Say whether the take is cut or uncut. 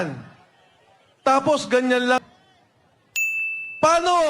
cut